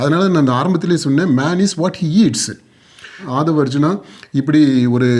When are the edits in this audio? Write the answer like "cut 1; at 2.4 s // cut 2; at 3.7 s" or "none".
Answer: cut 1; at 3.3 s